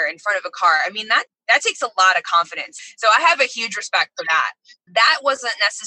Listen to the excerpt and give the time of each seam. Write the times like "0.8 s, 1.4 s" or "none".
1.3 s, 2.9 s, 4.9 s

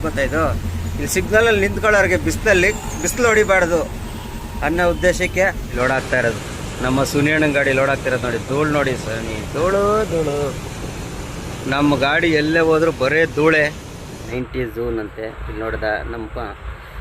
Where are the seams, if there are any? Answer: 5.8 s, 14.3 s

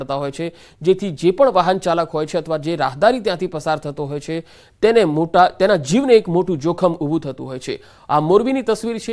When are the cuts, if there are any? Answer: 7.0 s

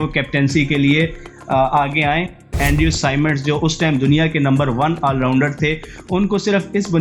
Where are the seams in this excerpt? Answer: 2.6 s

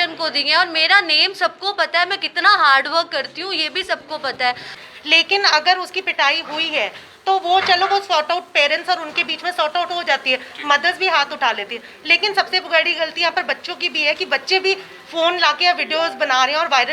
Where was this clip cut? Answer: 4.7 s

